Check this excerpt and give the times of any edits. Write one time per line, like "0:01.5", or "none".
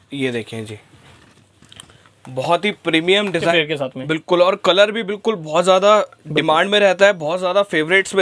0:03.5